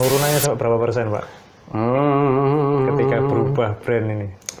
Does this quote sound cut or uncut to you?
uncut